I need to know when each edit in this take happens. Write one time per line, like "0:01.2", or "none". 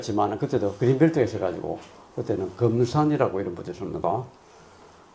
0:01.3